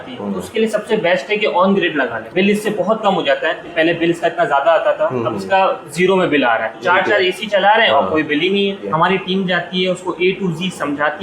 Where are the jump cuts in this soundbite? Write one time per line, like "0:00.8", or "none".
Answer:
0:02.2
0:03.7
0:06.7
0:08.9